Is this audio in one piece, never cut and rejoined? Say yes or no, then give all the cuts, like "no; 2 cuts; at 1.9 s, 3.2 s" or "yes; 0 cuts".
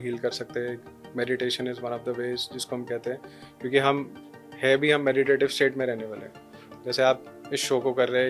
yes; 0 cuts